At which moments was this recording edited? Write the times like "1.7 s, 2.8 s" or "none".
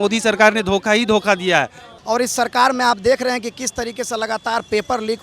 1.8 s